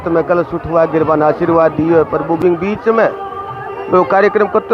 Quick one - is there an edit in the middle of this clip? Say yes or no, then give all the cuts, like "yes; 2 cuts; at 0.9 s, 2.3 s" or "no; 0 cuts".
yes; 1 cut; at 2.4 s